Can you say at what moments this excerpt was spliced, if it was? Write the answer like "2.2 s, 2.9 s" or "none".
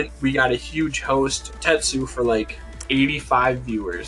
1.5 s, 2.8 s